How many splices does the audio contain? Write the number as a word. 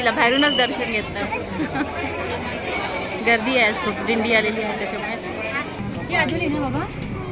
one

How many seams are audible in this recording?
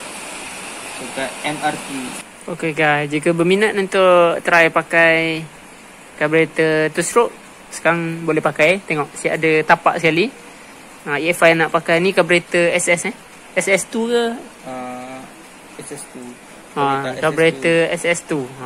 one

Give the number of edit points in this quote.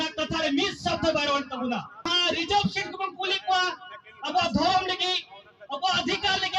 one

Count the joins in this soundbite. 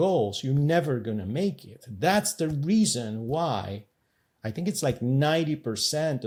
zero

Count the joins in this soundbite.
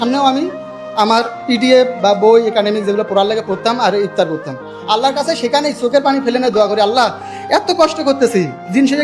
zero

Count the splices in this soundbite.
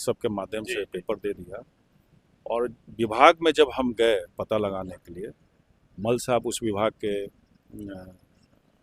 zero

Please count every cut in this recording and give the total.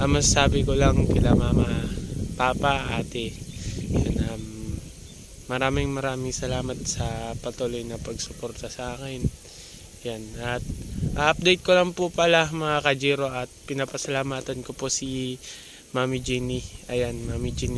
zero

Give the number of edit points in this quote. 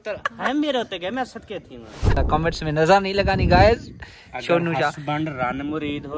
one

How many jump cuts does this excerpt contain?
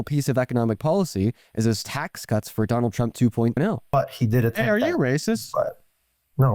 one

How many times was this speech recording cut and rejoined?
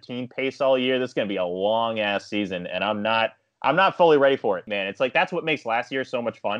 one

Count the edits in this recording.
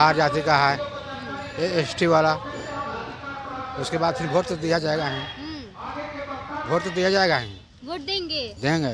zero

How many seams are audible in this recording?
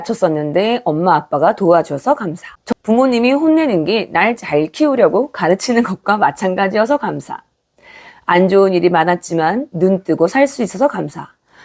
one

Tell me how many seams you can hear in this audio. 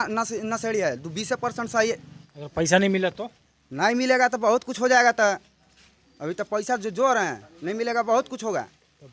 one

